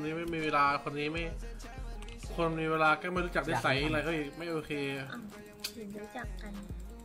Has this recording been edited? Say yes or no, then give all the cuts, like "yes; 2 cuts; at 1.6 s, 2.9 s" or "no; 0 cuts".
no; 0 cuts